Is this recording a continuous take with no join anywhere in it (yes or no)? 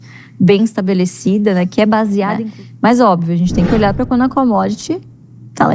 no